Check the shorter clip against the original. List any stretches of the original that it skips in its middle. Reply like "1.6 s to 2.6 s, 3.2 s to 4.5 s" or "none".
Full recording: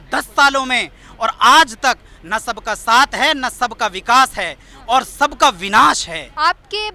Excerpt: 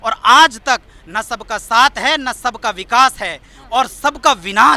none